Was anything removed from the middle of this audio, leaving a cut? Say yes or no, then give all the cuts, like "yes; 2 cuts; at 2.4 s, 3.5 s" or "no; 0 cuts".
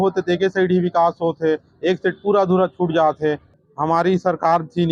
yes; 1 cut; at 3.5 s